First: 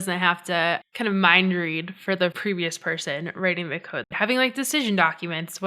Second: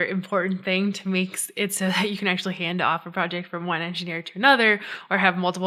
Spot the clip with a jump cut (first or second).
first